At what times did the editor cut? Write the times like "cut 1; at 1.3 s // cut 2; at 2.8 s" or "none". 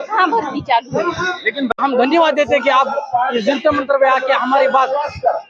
cut 1; at 1.8 s